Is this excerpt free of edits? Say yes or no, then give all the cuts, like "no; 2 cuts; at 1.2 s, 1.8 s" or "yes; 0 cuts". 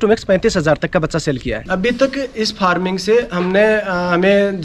no; 1 cut; at 1.7 s